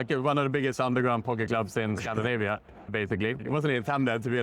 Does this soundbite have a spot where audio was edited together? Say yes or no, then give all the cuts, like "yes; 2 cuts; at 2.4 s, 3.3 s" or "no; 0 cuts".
yes; 1 cut; at 2.8 s